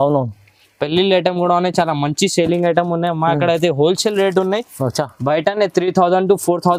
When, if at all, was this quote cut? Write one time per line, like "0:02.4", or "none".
none